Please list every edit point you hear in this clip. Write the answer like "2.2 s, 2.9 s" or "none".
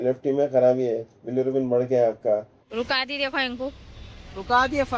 2.6 s